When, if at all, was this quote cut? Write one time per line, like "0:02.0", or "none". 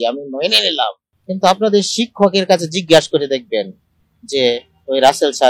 0:01.1